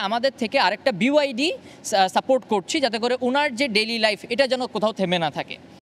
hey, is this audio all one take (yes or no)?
yes